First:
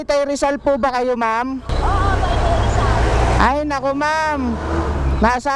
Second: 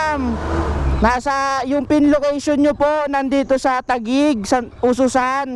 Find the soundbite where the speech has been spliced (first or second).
first